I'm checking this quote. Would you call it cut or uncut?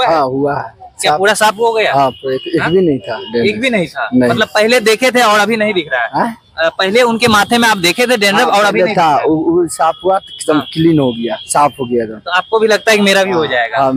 uncut